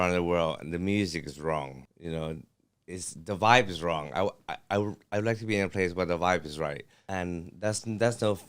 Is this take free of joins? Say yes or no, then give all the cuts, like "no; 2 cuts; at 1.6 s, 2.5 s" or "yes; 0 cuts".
no; 2 cuts; at 1.8 s, 6.9 s